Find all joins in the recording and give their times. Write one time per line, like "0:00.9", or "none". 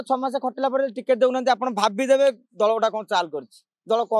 none